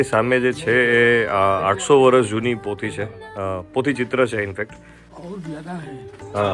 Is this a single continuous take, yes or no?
yes